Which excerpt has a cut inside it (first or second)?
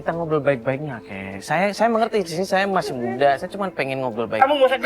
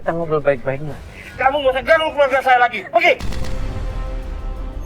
second